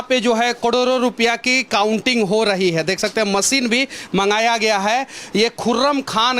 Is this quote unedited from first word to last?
yes; 0 cuts

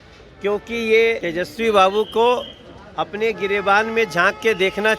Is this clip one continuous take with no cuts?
no; 1 cut; at 1.2 s

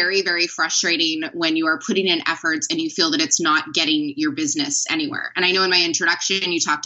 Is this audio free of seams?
yes; 0 cuts

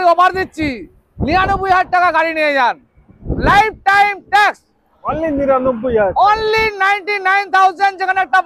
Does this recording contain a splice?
no; 0 cuts

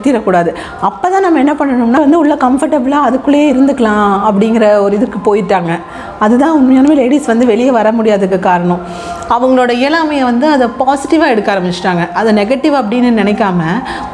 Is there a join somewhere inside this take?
yes; 1 cut; at 2.0 s

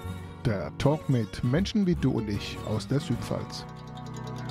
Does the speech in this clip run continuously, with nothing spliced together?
yes; 0 cuts

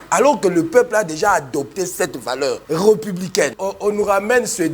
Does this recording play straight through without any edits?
no; 2 cuts; at 2.6 s, 3.6 s

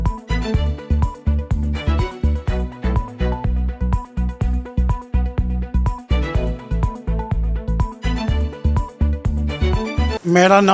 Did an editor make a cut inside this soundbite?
no; 0 cuts

